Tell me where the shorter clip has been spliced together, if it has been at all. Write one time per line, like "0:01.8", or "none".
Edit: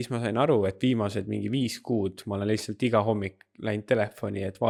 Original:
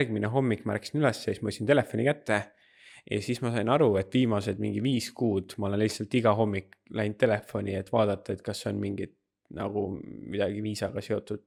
none